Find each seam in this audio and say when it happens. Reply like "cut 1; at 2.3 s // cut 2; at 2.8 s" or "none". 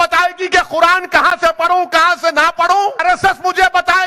cut 1; at 3.0 s